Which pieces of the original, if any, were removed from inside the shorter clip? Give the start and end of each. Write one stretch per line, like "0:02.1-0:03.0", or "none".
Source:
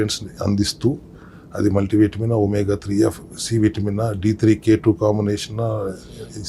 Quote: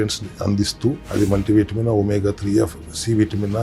0:01.0-0:01.5